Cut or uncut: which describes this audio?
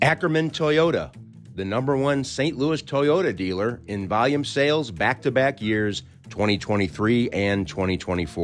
uncut